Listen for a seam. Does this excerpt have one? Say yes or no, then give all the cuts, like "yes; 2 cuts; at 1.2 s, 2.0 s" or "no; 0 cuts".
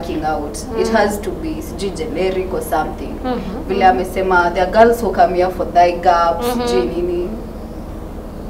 no; 0 cuts